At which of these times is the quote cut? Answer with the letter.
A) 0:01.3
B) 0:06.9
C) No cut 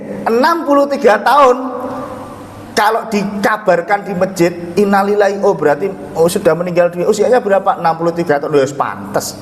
C